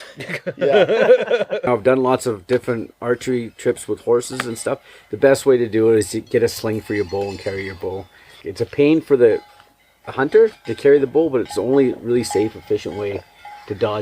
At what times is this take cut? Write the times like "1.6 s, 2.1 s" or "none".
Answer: 1.7 s, 8.4 s